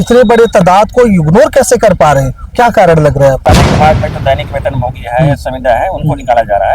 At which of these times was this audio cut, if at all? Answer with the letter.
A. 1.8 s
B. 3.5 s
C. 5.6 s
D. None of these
B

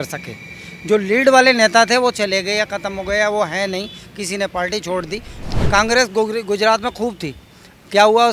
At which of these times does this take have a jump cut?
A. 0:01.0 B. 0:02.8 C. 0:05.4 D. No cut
C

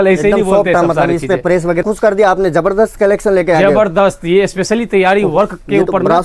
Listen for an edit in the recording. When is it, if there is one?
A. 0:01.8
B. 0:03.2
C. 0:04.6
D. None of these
A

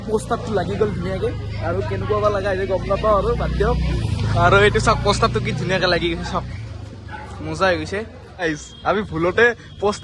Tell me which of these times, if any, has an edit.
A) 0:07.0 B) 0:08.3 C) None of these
B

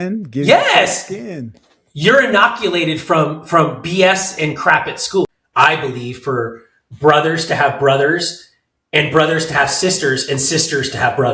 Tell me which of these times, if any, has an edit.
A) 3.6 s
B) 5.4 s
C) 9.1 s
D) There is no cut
B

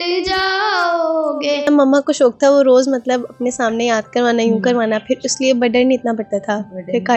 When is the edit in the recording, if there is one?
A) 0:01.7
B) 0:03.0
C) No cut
A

